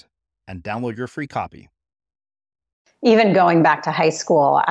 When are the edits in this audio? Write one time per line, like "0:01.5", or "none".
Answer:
0:02.8